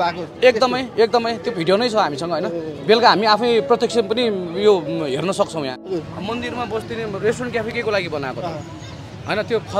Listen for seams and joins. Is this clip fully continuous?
no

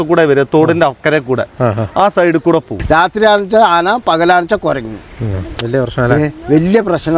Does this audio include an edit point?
yes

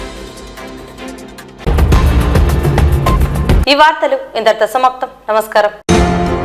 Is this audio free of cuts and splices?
yes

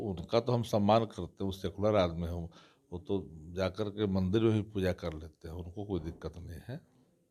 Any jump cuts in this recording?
no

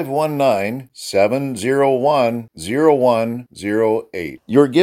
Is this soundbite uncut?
yes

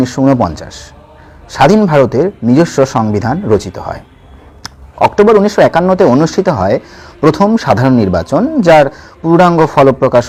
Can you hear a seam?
no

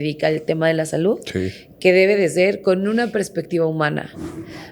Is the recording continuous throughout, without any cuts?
yes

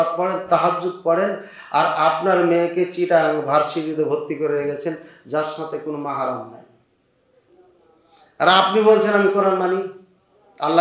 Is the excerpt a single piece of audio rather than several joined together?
yes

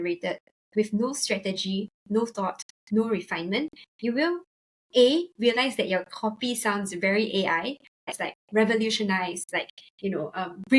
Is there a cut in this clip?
yes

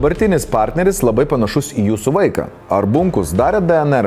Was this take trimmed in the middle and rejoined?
no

